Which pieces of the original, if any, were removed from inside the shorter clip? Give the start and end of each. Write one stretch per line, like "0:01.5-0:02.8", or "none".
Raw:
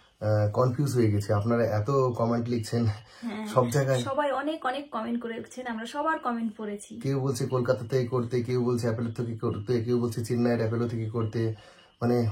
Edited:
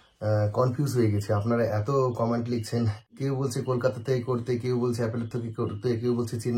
0:03.1-0:06.9